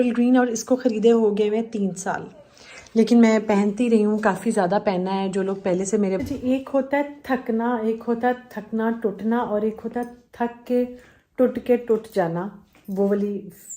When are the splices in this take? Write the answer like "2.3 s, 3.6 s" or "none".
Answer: 6.2 s